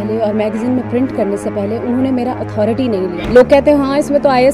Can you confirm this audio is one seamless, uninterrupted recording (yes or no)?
yes